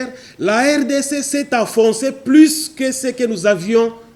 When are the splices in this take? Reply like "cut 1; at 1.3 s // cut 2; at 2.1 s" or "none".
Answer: none